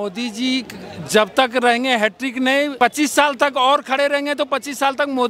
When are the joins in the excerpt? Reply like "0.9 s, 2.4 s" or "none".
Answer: 2.7 s